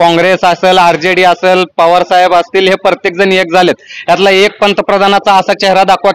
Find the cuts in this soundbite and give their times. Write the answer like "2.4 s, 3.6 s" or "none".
none